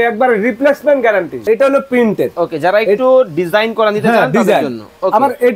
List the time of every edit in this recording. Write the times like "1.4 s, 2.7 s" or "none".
1.3 s

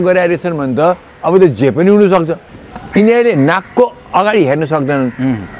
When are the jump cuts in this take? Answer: 2.5 s

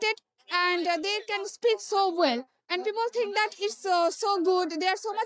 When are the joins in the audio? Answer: none

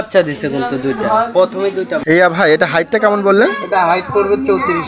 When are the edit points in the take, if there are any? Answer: 1.9 s

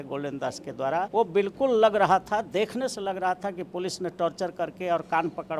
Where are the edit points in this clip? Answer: 1.1 s

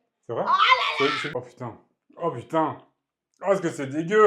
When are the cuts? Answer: 1.2 s

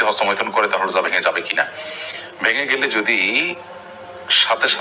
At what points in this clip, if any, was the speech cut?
none

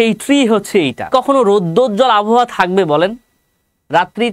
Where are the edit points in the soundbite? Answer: 1.1 s

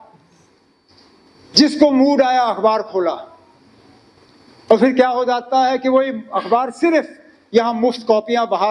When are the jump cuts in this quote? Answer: none

